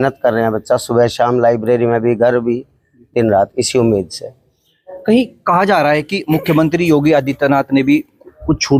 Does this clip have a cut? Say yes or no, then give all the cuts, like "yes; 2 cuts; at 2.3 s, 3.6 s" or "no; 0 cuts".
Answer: no; 0 cuts